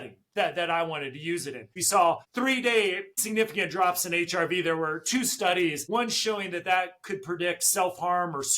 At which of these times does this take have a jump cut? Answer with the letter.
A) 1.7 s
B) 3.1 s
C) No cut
A